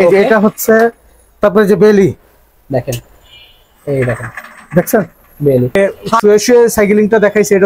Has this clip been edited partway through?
yes; 1 cut; at 5.8 s

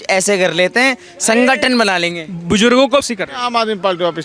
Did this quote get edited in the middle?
yes; 1 cut; at 3.0 s

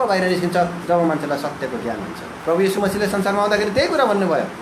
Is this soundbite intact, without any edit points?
no; 1 cut; at 2.3 s

